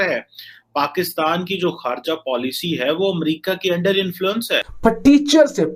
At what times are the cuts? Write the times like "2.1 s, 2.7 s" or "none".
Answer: 4.6 s